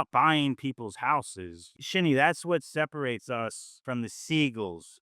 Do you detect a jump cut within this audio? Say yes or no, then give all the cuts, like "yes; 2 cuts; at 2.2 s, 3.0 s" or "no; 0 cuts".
yes; 1 cut; at 1.8 s